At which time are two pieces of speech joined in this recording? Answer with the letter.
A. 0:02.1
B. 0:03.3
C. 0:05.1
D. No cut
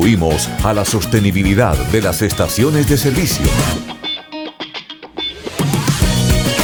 D